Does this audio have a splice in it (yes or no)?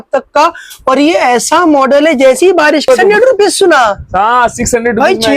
yes